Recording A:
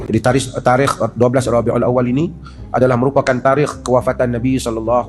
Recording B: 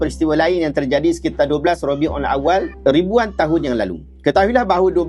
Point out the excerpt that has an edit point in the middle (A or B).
B